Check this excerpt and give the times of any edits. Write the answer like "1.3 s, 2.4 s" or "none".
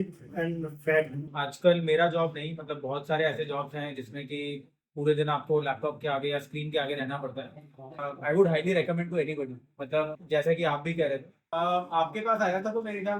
1.2 s, 8.1 s, 10.2 s, 11.4 s